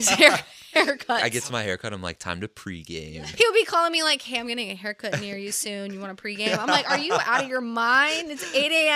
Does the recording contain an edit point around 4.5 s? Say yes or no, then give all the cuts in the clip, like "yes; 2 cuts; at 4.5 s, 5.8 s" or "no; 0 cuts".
no; 2 cuts; at 1.2 s, 3.1 s